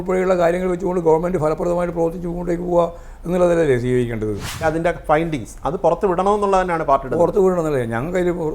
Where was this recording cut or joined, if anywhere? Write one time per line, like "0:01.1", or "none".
0:04.6